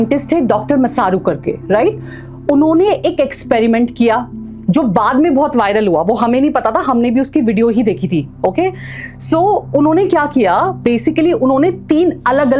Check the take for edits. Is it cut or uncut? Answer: uncut